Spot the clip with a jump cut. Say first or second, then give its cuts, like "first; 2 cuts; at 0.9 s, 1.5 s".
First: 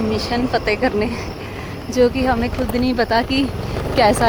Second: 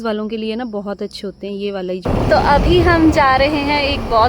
second; 1 cut; at 2.1 s